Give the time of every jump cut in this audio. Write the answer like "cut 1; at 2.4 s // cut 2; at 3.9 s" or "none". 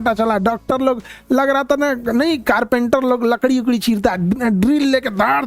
none